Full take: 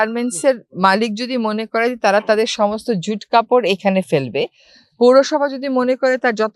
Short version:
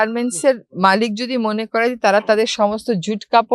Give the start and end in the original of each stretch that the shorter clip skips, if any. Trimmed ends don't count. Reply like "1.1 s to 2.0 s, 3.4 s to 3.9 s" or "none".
none